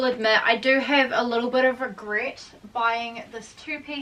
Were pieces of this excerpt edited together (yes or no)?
no